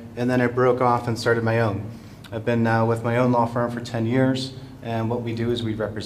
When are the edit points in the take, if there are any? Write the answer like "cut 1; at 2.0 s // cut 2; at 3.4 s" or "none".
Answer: none